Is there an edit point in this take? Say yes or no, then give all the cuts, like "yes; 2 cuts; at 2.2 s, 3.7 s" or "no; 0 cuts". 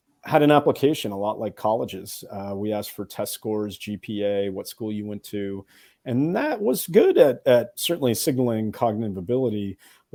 no; 0 cuts